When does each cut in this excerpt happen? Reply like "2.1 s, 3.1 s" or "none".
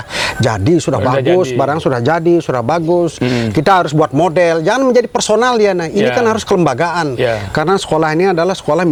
none